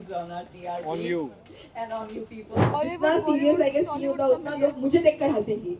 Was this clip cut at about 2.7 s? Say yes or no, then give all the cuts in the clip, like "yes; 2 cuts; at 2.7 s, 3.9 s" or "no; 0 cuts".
yes; 1 cut; at 2.7 s